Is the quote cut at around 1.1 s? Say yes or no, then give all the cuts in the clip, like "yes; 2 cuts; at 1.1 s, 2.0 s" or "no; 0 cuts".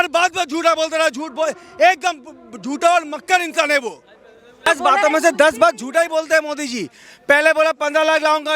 no; 1 cut; at 4.7 s